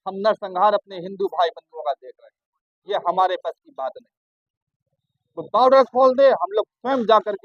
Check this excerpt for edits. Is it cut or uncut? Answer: uncut